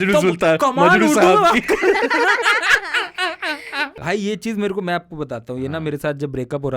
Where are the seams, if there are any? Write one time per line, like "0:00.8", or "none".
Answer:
0:04.0